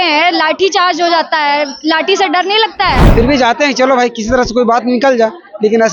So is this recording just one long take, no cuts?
no; 1 cut; at 3.0 s

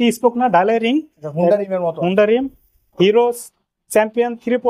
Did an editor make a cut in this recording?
no; 0 cuts

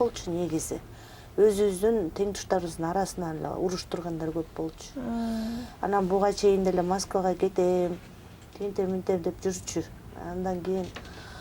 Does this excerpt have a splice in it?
no; 0 cuts

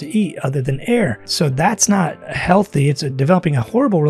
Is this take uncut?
no; 2 cuts; at 1.2 s, 2.3 s

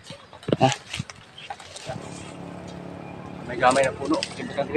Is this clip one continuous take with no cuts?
no; 1 cut; at 2.0 s

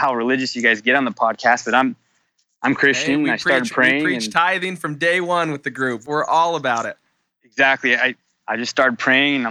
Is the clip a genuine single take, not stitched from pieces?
no; 1 cut; at 8.3 s

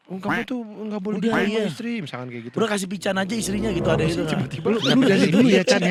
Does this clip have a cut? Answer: no; 0 cuts

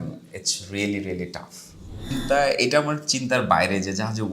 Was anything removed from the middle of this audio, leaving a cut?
yes; 1 cut; at 2.1 s

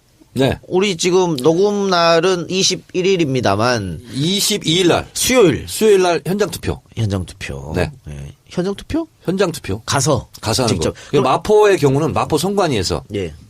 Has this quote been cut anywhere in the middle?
yes; 1 cut; at 11.9 s

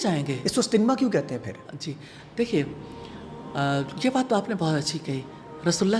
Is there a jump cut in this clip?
no; 0 cuts

